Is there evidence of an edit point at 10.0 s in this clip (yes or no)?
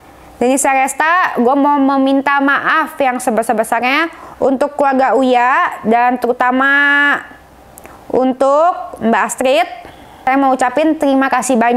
yes